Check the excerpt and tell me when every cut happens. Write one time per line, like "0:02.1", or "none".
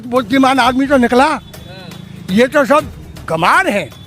none